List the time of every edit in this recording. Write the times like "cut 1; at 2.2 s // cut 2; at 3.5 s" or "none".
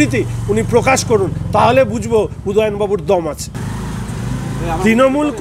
cut 1; at 3.5 s